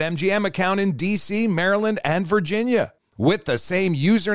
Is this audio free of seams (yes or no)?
yes